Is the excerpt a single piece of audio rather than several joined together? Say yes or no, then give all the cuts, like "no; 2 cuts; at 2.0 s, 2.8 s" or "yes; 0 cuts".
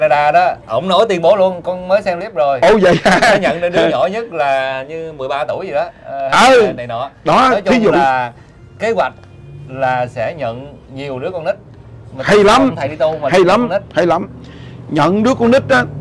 yes; 0 cuts